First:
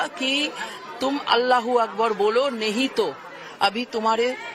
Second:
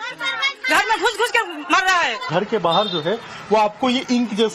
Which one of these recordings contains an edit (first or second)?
second